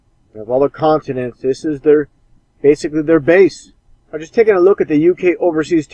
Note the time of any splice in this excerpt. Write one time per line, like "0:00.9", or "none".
0:05.0